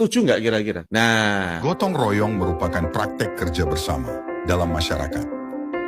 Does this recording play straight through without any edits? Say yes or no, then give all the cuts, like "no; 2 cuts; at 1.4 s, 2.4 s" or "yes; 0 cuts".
no; 1 cut; at 1.6 s